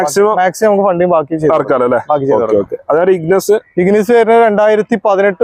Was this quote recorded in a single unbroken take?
yes; 0 cuts

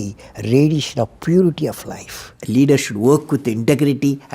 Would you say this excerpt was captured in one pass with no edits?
no; 1 cut; at 2.3 s

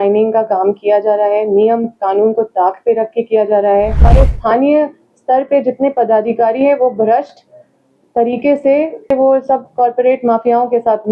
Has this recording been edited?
yes; 2 cuts; at 4.1 s, 9.1 s

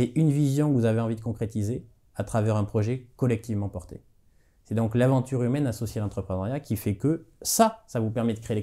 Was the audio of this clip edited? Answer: no; 0 cuts

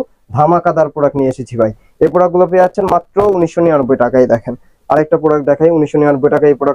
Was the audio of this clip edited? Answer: no; 0 cuts

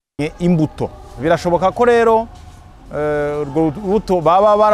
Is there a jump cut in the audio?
yes; 1 cut; at 1.1 s

